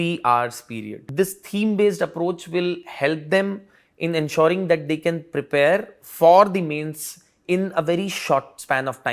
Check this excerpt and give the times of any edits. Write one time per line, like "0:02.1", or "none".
0:01.0